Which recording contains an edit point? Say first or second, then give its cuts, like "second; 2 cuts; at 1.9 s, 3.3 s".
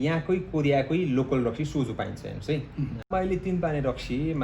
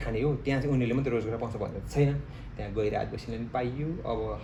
first; 1 cut; at 3.1 s